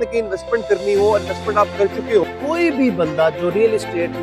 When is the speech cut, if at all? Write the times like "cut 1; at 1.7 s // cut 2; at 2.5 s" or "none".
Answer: cut 1; at 2.2 s